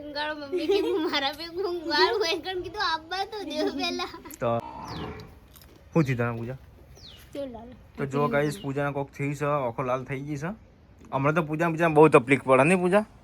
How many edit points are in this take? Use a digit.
1